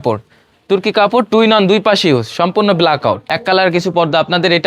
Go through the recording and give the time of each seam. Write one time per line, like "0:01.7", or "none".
0:03.2